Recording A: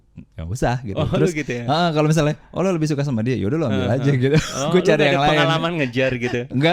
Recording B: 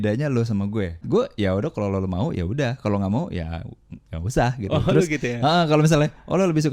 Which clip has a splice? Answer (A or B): B